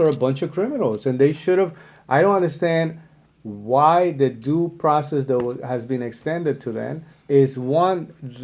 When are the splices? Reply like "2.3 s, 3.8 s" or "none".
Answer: 7.1 s